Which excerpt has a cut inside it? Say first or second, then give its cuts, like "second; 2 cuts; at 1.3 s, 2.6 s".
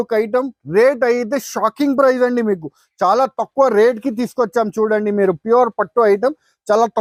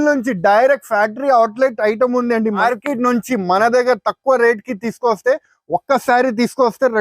second; 1 cut; at 2.6 s